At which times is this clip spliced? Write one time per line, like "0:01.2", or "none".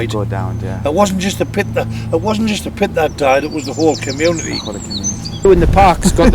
0:05.2